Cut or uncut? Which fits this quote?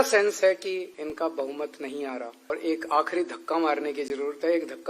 cut